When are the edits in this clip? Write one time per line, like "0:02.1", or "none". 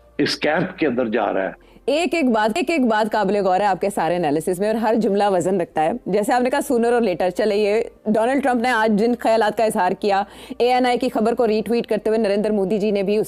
none